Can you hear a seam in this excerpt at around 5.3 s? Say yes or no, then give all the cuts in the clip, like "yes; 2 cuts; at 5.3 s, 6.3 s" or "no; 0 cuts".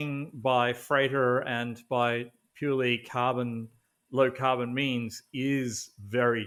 no; 0 cuts